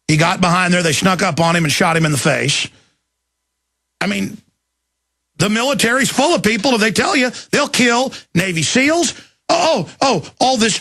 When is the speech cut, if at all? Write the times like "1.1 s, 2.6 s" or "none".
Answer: 6.0 s